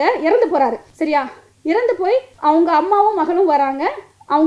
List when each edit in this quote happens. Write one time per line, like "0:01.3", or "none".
0:00.9
0:02.3

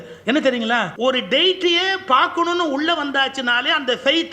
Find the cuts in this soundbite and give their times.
0:00.9

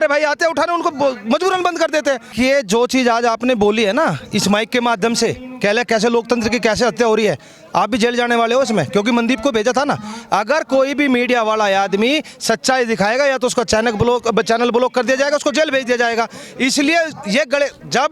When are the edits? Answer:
0:02.3

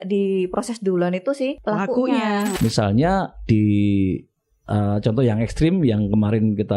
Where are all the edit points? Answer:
0:01.6
0:02.5

